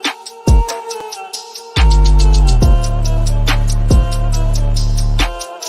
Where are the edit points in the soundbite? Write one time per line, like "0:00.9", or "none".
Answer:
0:01.0